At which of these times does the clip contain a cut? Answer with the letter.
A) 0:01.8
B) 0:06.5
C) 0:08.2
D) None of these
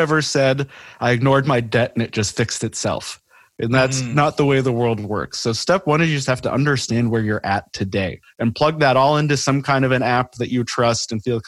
C